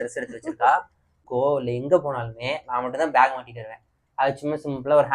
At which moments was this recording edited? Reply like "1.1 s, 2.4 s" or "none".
1.3 s